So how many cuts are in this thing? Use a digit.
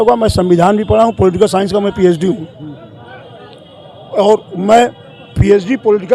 0